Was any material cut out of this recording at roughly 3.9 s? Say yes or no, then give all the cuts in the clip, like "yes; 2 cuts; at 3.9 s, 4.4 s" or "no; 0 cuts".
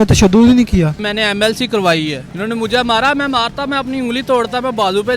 no; 2 cuts; at 1.0 s, 2.3 s